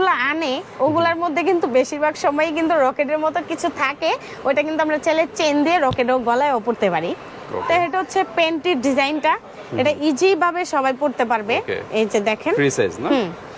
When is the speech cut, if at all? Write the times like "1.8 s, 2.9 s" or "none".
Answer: none